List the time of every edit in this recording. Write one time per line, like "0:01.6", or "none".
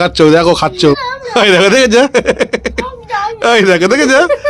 0:01.1